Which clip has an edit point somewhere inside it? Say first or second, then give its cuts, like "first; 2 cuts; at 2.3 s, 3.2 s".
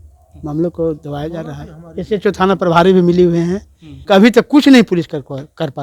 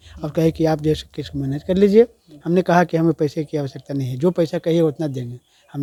first; 1 cut; at 3.9 s